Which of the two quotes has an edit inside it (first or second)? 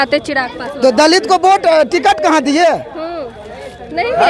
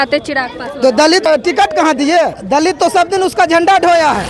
second